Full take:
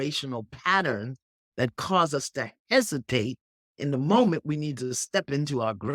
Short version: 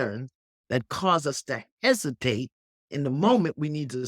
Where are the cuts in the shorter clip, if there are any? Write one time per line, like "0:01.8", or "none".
none